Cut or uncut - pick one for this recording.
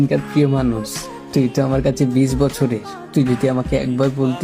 uncut